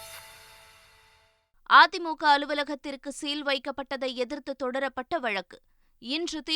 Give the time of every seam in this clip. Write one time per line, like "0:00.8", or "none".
0:01.4